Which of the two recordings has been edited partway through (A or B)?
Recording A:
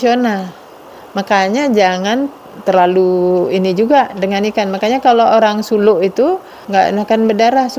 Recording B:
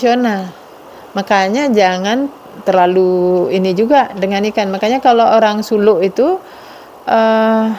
A